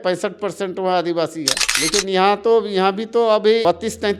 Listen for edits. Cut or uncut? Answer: uncut